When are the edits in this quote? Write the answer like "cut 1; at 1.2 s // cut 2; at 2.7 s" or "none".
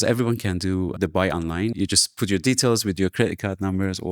none